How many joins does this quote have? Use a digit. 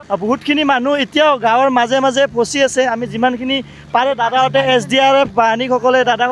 0